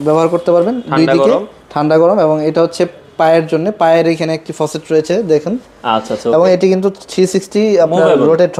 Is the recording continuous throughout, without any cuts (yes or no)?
yes